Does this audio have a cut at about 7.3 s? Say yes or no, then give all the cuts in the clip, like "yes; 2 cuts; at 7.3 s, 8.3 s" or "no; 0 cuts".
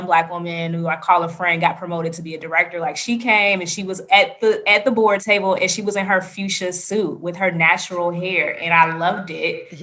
no; 1 cut; at 5.2 s